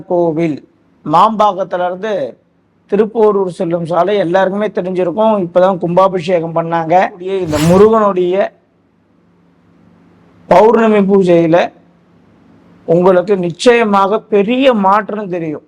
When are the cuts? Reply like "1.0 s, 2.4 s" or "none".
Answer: 7.3 s

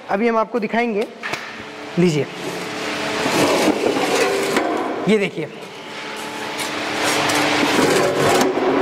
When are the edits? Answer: none

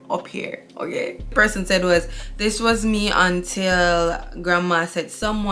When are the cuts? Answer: 1.3 s

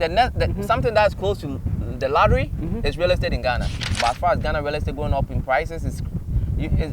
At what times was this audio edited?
3.8 s

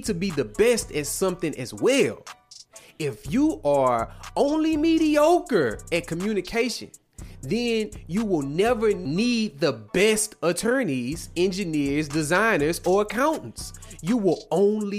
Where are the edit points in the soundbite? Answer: 9.0 s

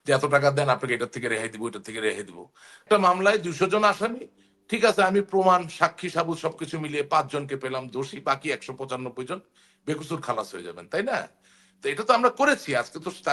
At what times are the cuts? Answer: 2.8 s

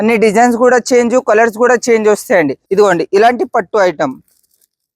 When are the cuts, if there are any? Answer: 2.6 s

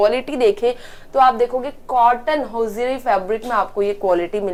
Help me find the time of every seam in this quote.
none

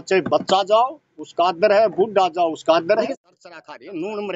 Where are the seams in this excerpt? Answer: 3.1 s

